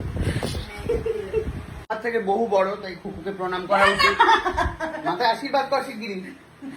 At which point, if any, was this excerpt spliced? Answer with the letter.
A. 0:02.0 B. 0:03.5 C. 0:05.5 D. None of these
A